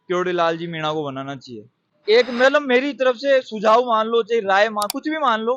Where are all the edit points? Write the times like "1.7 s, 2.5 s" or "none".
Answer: 1.9 s